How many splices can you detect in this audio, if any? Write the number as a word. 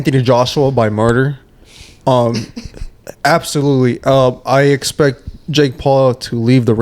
zero